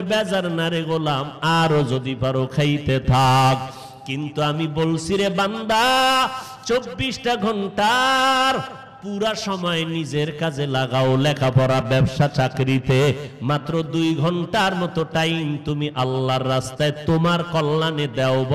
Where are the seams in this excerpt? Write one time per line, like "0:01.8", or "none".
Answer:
none